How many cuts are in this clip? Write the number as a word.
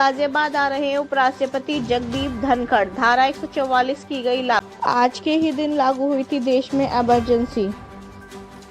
one